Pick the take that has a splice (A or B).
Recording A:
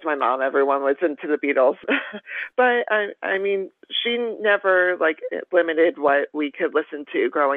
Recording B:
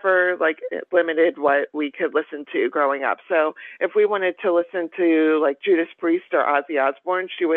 A